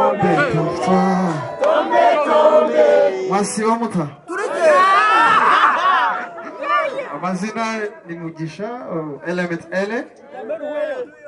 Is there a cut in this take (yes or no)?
no